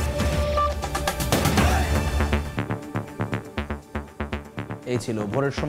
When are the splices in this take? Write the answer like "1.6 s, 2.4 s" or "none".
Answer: none

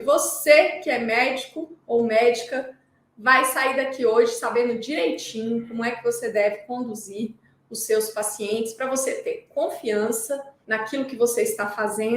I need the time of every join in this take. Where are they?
10.5 s

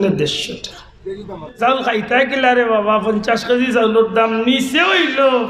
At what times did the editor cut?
1.6 s

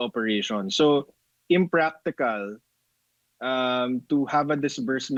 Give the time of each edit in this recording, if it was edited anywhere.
none

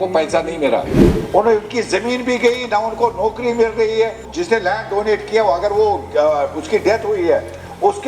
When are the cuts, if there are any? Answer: 1.0 s, 4.3 s

